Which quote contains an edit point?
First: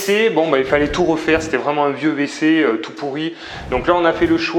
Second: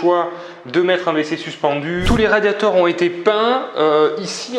second; 1 cut; at 2.0 s

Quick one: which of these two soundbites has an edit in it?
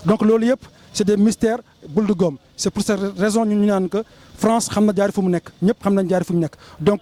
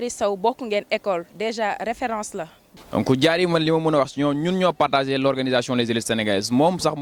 second; 1 cut; at 2.6 s

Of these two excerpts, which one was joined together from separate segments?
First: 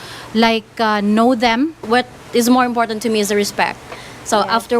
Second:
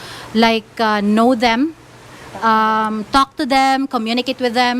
first; 1 cut; at 1.8 s

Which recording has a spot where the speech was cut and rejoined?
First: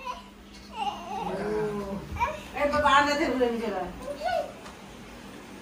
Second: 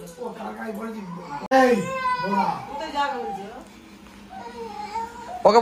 second; 1 cut; at 1.5 s

